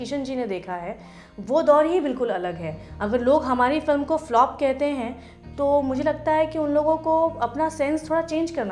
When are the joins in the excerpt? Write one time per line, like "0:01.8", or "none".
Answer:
none